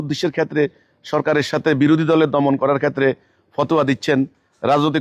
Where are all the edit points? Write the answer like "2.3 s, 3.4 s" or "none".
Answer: none